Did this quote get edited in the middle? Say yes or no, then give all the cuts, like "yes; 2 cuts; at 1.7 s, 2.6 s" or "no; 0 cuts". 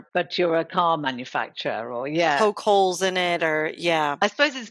no; 0 cuts